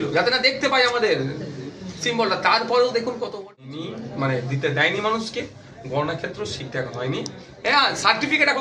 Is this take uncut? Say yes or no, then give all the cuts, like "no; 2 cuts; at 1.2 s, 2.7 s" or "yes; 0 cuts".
no; 1 cut; at 3.7 s